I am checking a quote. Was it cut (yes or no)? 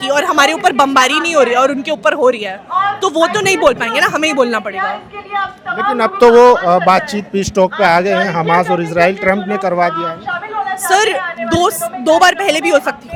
no